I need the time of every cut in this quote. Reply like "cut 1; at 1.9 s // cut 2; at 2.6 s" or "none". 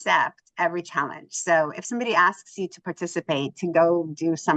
none